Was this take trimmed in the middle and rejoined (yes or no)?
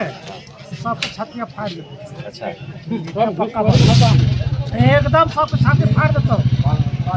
no